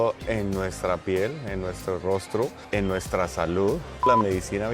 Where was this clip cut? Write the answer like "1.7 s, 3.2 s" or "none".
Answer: 2.6 s, 4.1 s